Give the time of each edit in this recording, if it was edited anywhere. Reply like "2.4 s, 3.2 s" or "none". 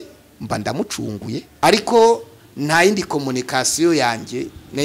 1.5 s